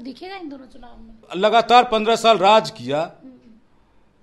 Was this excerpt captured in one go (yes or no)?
no